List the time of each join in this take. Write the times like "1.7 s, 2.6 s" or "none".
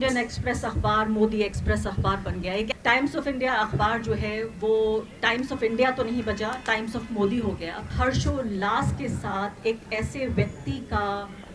2.7 s, 7.9 s

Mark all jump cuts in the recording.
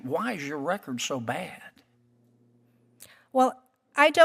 none

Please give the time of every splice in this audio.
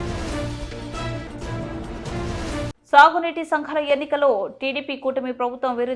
none

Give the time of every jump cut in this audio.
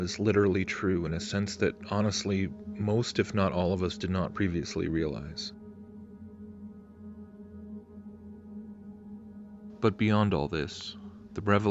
9.7 s

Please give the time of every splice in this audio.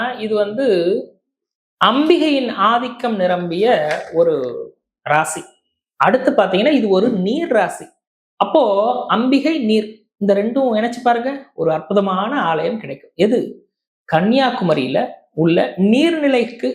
none

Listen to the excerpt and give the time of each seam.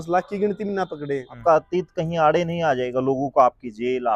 1.3 s

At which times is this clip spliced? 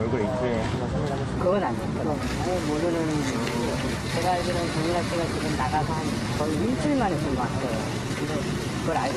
none

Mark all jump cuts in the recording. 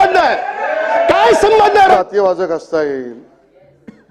1.9 s

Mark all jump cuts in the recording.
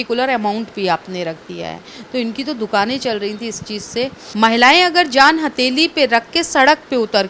4.2 s

